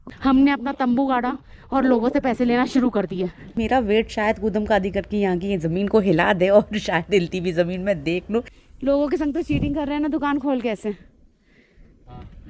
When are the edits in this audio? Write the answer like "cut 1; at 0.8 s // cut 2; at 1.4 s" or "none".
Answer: cut 1; at 3.6 s // cut 2; at 8.6 s

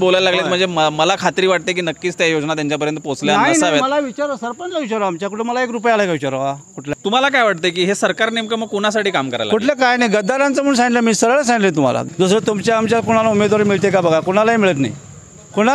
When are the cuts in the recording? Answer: cut 1; at 6.8 s // cut 2; at 12.0 s

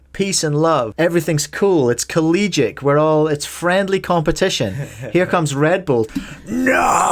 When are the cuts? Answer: cut 1; at 0.9 s // cut 2; at 6.1 s

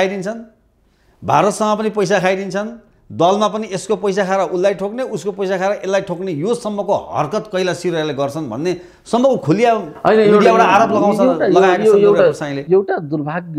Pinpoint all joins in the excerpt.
none

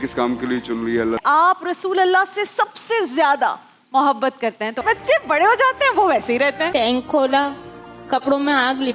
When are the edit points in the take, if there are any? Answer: cut 1; at 1.2 s // cut 2; at 4.8 s // cut 3; at 6.7 s

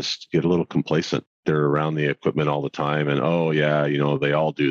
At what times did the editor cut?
cut 1; at 1.3 s

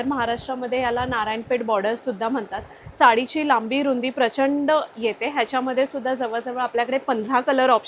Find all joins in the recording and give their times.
none

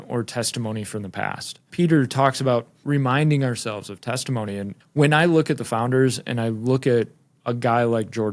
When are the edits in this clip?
cut 1; at 1.7 s // cut 2; at 2.8 s // cut 3; at 4.7 s

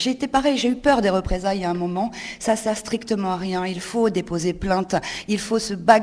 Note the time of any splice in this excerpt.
none

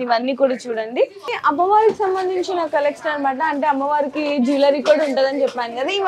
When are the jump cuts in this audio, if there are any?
cut 1; at 1.4 s

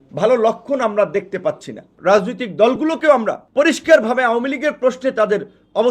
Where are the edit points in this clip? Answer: cut 1; at 1.9 s // cut 2; at 3.4 s

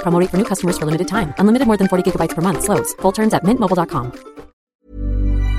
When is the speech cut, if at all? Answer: cut 1; at 4.6 s

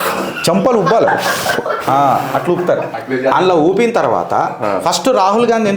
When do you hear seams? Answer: cut 1; at 2.9 s

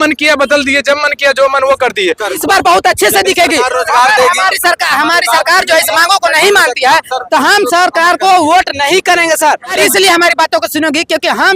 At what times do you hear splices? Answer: cut 1; at 2.4 s // cut 2; at 9.7 s

